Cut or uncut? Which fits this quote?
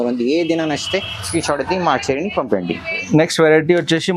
uncut